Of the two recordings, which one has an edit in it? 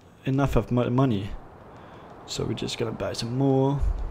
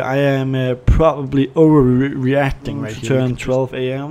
second; 1 cut; at 3.0 s

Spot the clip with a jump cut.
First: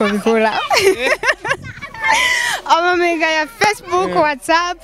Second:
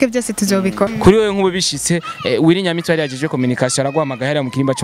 second; 1 cut; at 0.9 s

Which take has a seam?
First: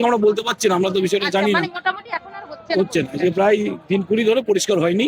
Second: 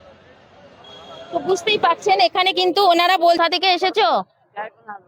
second; 1 cut; at 3.4 s

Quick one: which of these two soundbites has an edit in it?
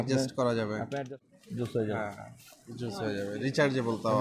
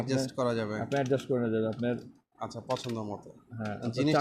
first; 1 cut; at 1.1 s

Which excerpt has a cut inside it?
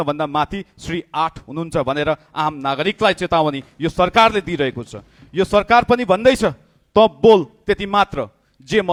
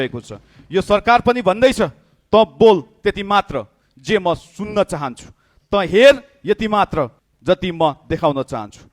second; 1 cut; at 7.3 s

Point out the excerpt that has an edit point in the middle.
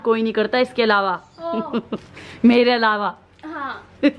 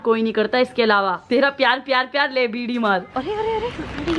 second; 2 cuts; at 1.2 s, 3.2 s

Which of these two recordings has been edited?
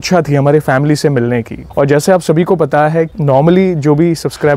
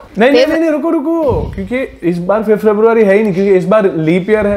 first; 1 cut; at 1.6 s

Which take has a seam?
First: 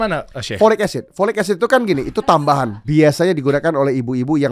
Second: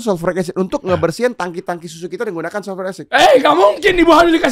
first; 1 cut; at 2.8 s

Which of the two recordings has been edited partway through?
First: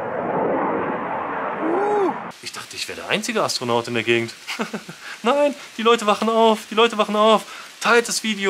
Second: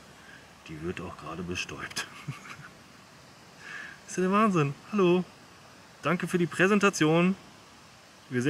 first; 1 cut; at 2.3 s

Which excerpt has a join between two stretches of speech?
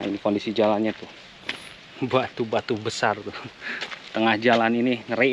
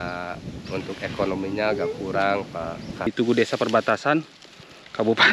second; 1 cut; at 3.1 s

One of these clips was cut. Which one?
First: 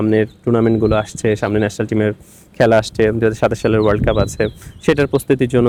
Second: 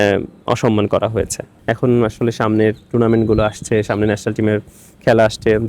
second; 1 cut; at 1.5 s

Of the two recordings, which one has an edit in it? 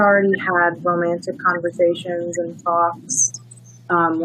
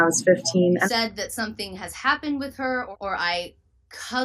second; 2 cuts; at 0.8 s, 2.9 s

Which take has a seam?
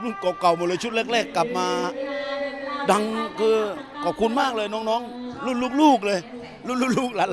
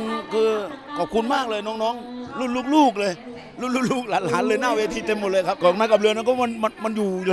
second; 1 cut; at 5.6 s

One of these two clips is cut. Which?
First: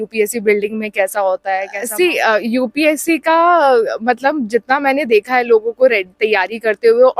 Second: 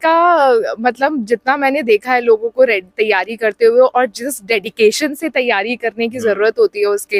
first; 1 cut; at 1.7 s

